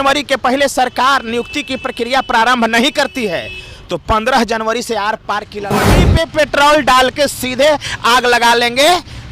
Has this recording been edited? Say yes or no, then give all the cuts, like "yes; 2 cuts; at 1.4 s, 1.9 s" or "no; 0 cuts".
yes; 1 cut; at 6.0 s